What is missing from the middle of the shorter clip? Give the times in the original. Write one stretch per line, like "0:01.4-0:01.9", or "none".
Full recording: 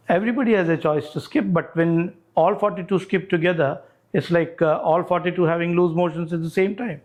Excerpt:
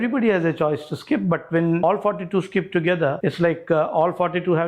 0:02.1-0:02.4
0:03.7-0:04.1